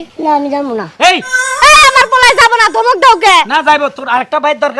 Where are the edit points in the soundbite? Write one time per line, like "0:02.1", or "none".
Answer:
none